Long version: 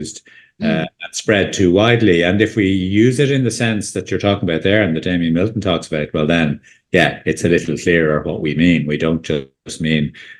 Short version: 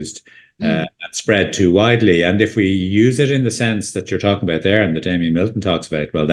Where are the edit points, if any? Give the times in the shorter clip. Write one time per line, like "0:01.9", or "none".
none